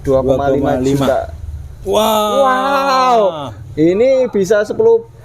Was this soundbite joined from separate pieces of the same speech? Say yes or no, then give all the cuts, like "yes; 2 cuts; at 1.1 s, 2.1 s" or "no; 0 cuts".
no; 0 cuts